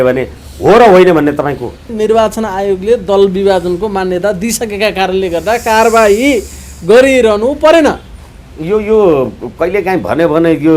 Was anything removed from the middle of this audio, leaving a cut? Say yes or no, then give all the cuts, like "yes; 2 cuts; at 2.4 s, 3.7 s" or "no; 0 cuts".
yes; 1 cut; at 1.9 s